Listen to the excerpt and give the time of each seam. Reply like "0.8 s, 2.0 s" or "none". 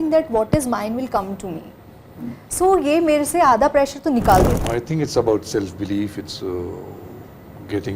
4.6 s